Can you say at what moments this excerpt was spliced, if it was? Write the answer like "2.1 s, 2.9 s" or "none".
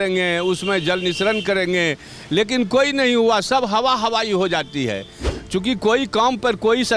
5.3 s